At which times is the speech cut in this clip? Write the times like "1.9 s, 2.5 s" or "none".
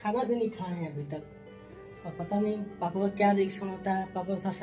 none